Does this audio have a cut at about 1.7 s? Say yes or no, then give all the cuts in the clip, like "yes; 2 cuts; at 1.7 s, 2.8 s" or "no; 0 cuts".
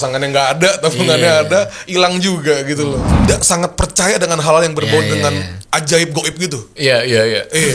no; 1 cut; at 3.3 s